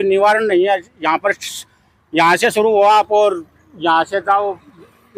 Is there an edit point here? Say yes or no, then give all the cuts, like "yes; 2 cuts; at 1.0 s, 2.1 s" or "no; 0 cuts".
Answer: no; 0 cuts